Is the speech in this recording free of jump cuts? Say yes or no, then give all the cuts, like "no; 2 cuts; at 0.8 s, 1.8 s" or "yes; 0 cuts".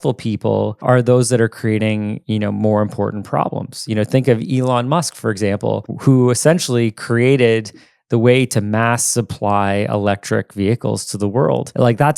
yes; 0 cuts